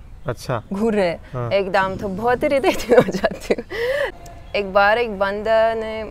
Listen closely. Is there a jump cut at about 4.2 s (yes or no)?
yes